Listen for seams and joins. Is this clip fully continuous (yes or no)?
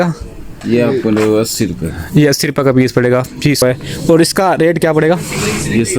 no